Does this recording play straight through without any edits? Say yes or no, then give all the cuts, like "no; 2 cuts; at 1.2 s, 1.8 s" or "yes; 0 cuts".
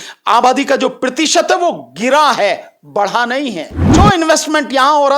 no; 1 cut; at 3.7 s